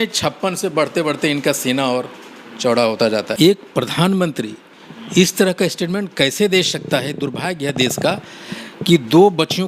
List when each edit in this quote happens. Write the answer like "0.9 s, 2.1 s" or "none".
3.3 s